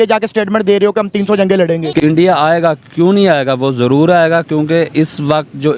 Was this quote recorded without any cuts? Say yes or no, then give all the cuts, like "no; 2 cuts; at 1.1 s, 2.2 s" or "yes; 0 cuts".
no; 1 cut; at 1.9 s